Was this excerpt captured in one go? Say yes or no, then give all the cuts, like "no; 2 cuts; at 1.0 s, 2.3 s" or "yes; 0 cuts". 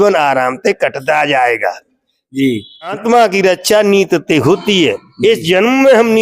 no; 1 cut; at 2.9 s